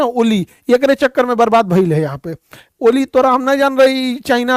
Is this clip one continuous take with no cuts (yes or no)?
yes